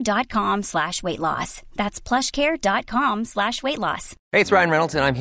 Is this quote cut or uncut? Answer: cut